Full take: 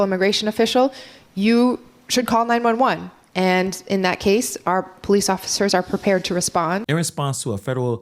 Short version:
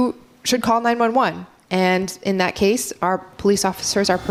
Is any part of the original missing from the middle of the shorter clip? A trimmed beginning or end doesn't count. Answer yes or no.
no